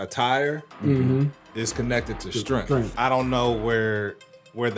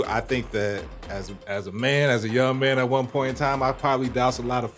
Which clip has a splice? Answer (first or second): first